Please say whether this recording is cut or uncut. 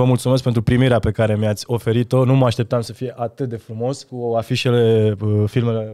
cut